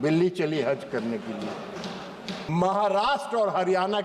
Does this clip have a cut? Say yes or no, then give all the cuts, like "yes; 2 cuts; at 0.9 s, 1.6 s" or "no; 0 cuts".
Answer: yes; 1 cut; at 2.4 s